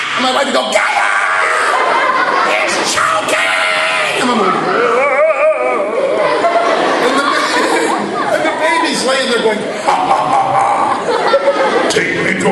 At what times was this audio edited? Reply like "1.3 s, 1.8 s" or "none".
9.3 s